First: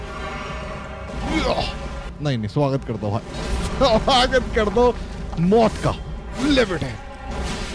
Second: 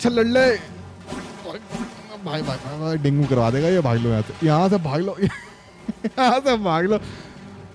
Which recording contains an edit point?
first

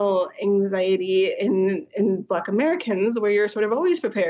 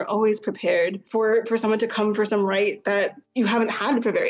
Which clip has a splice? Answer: second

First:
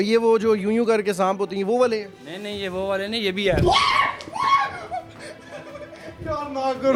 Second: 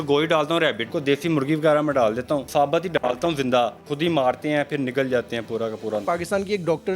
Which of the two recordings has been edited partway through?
second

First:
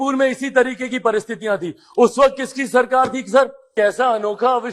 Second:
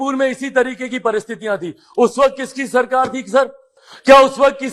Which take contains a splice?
first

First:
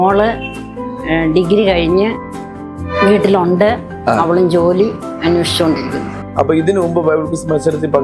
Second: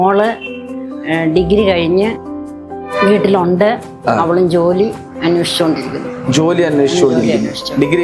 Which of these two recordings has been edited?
first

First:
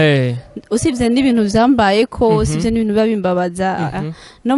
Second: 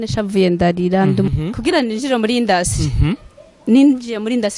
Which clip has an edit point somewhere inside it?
second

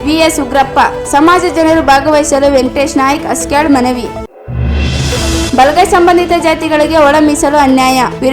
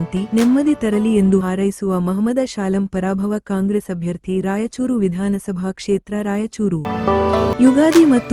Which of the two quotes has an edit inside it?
second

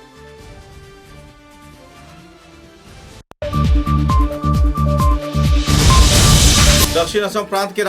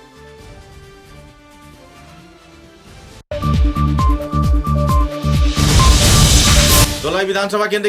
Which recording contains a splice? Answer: first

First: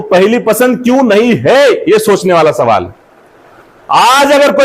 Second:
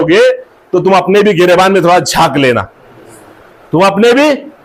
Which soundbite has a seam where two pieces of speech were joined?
first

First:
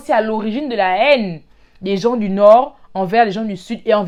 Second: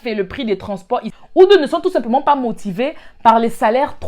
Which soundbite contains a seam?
second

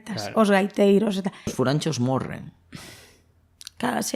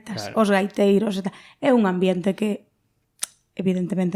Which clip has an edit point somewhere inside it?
first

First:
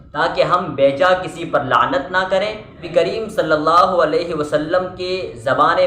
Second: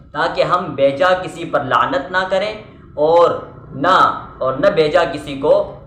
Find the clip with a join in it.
first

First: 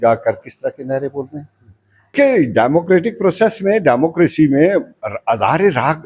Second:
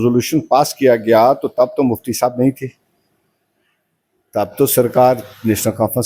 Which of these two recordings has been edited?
first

